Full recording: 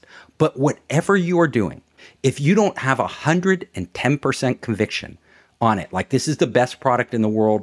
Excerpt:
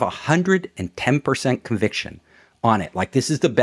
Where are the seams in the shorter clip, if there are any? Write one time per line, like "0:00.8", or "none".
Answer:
none